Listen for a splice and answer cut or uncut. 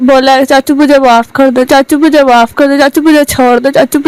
uncut